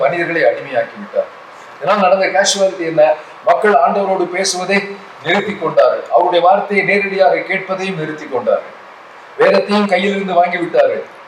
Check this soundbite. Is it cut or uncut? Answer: uncut